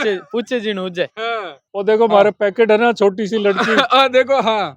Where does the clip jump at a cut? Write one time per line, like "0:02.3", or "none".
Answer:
0:01.6